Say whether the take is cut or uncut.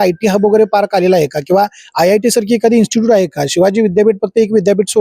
uncut